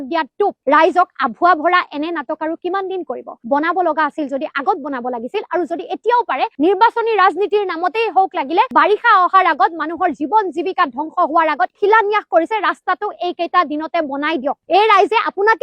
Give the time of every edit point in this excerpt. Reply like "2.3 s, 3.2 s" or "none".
6.5 s